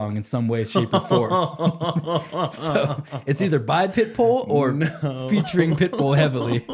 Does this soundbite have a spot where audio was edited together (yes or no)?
no